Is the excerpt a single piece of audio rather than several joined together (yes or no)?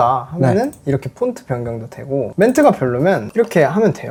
yes